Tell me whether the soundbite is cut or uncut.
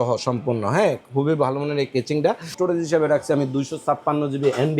cut